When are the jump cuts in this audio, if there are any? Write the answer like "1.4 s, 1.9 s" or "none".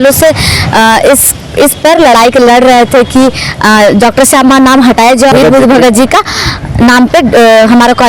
5.3 s